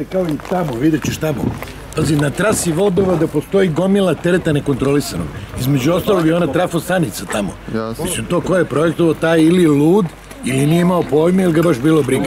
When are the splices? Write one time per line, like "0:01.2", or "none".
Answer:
none